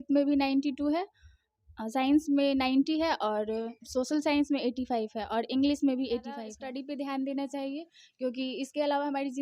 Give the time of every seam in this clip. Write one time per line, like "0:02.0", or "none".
0:06.6